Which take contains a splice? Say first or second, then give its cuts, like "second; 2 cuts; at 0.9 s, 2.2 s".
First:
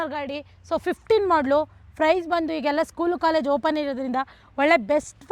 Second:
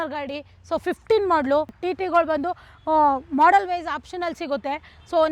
second; 1 cut; at 1.8 s